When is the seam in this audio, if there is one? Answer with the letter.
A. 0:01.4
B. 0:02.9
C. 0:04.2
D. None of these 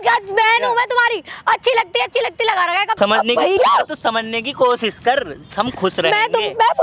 B